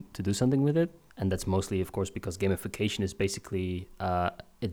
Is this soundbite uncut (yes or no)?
no